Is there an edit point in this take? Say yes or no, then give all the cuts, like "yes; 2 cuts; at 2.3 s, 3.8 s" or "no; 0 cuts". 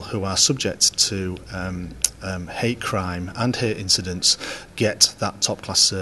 no; 0 cuts